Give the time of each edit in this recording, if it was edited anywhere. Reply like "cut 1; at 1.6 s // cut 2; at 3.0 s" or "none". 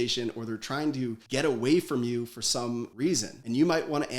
cut 1; at 3.2 s